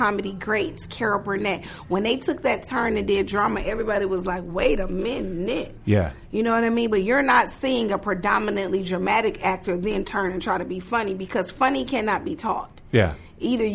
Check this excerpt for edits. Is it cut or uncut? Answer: uncut